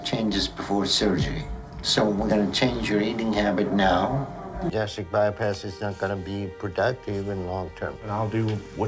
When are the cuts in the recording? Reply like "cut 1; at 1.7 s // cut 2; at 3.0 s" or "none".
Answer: cut 1; at 4.7 s // cut 2; at 6.3 s